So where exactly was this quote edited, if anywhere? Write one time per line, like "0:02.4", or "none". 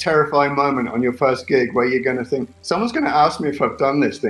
none